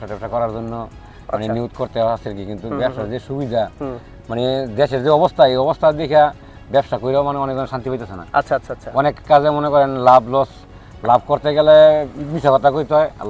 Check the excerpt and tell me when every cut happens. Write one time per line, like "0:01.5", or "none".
none